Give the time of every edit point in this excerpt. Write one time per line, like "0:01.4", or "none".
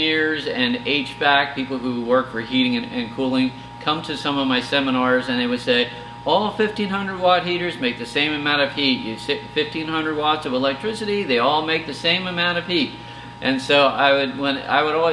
none